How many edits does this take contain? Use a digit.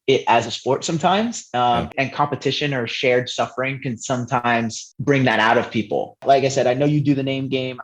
2